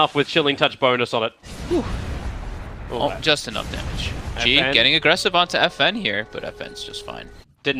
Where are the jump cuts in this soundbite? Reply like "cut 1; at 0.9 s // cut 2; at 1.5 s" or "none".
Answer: cut 1; at 5.1 s